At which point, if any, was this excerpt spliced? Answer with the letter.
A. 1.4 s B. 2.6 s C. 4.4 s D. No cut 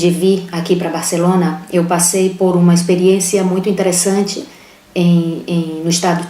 C